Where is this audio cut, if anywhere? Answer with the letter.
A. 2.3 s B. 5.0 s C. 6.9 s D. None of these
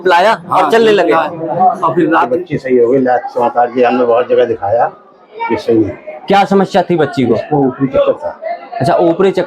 A